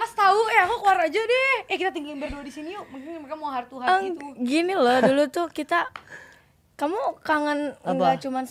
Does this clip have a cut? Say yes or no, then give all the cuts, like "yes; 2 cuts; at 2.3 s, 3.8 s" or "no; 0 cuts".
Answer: no; 0 cuts